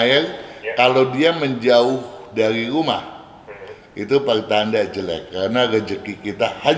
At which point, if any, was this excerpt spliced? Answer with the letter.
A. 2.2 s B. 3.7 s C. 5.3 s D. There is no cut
D